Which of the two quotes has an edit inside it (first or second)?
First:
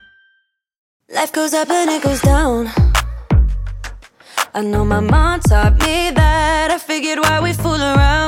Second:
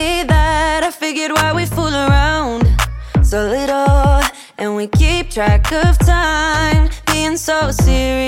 first